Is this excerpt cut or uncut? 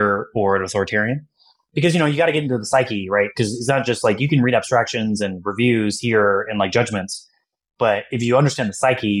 uncut